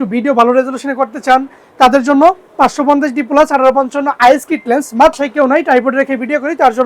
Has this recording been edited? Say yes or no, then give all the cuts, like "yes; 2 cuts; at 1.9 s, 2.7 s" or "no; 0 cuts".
yes; 1 cut; at 5.2 s